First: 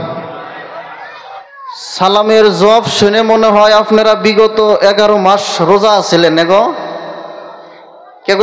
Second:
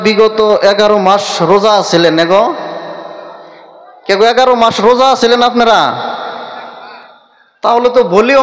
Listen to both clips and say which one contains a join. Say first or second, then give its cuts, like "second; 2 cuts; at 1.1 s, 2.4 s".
first; 1 cut; at 1.4 s